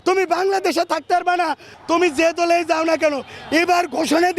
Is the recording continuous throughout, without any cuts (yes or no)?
no